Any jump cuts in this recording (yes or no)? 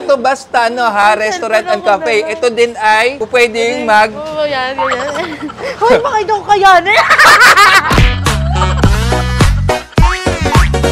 yes